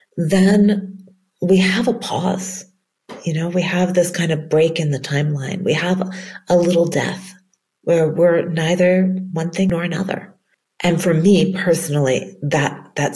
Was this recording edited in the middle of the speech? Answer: yes; 1 cut; at 9.7 s

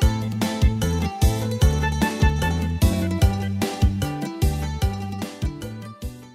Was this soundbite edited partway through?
no; 0 cuts

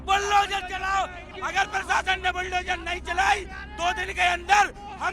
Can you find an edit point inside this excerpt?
yes; 1 cut; at 1.2 s

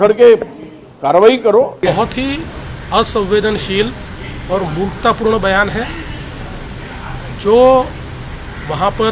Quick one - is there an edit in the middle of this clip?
yes; 1 cut; at 1.8 s

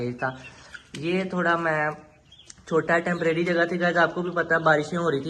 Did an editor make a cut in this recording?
no; 0 cuts

